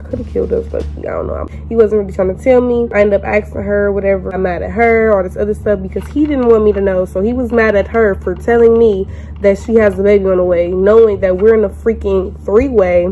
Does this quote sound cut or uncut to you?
uncut